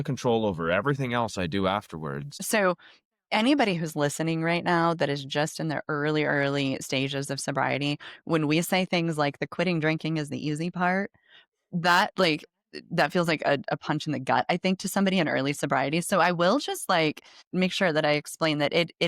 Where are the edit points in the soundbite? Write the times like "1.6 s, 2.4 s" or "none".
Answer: 2.4 s, 17.4 s